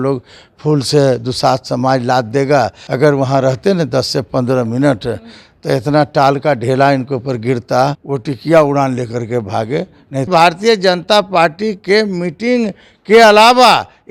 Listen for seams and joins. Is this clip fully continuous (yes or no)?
no